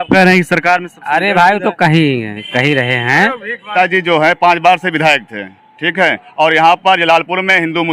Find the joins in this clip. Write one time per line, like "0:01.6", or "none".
0:03.6

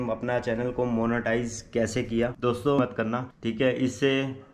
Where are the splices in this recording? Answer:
0:02.8

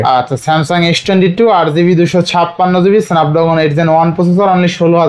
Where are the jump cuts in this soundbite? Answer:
none

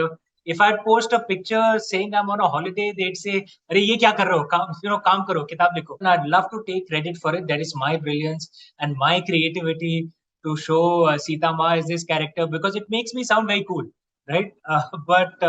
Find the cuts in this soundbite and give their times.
0:06.0

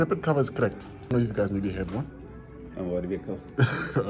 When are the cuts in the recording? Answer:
0:01.1

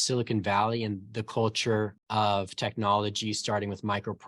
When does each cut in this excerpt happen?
0:02.0

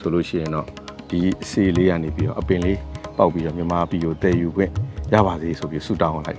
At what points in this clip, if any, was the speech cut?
none

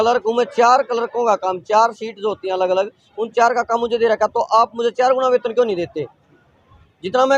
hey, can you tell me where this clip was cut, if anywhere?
none

